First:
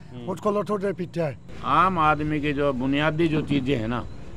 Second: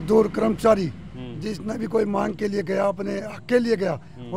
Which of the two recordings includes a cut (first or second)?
first